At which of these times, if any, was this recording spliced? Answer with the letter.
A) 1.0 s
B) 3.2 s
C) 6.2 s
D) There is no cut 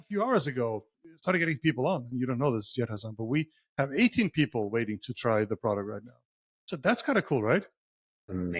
A